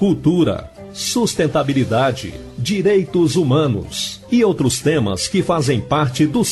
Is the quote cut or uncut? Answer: uncut